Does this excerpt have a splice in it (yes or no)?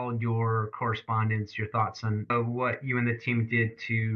yes